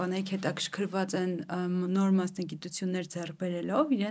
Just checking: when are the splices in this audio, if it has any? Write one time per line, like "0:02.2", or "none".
none